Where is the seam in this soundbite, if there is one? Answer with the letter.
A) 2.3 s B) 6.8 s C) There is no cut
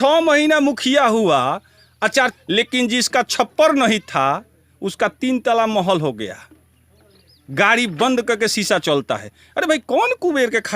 A